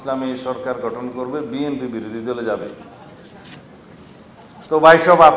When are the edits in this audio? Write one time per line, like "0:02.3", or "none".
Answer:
0:03.3
0:04.7